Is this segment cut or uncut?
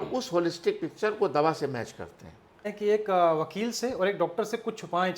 cut